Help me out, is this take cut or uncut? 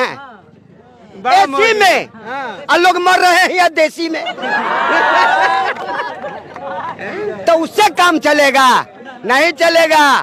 uncut